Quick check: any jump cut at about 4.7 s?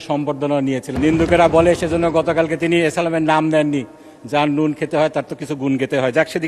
no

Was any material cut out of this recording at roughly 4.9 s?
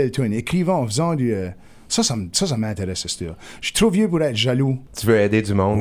yes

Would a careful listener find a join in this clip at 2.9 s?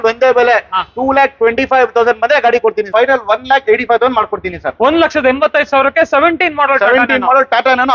yes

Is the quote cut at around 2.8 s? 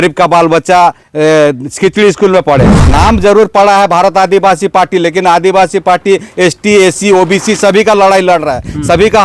yes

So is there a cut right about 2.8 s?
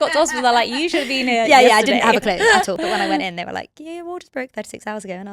yes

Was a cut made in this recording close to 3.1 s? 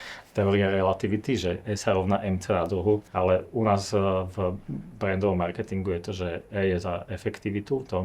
yes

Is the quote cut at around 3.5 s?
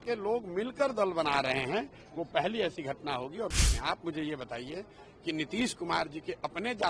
yes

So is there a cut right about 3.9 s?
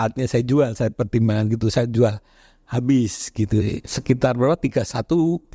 yes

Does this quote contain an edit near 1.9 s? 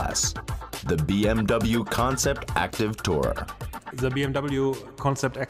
yes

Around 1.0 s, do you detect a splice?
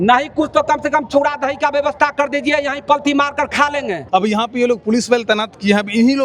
no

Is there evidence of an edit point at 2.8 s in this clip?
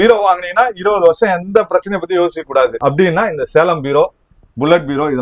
yes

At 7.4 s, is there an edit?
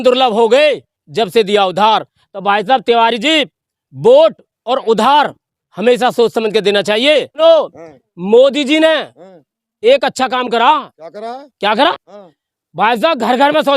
yes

